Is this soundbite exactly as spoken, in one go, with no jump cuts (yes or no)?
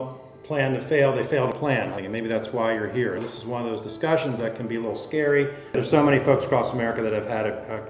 no